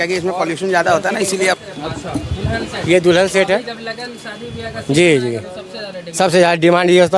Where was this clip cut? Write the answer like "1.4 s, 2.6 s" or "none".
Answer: 1.6 s